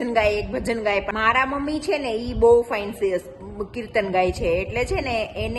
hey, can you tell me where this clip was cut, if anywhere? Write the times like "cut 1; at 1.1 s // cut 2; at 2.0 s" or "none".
cut 1; at 1.1 s